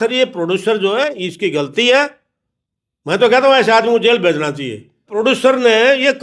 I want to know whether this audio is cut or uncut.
cut